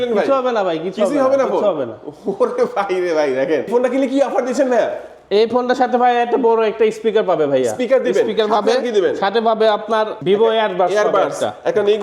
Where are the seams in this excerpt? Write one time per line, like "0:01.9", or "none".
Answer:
0:03.7
0:10.1